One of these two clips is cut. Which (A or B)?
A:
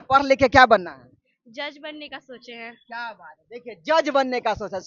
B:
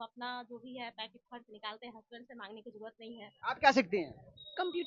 B